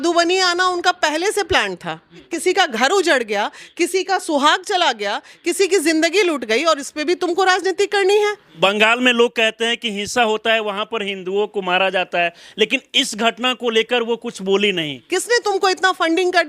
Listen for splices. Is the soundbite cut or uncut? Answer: cut